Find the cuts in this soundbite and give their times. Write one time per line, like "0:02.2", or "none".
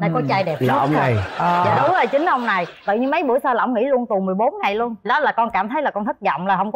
none